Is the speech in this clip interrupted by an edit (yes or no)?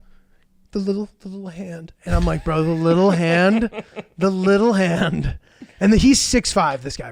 no